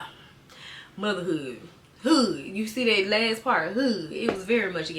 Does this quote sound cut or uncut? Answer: uncut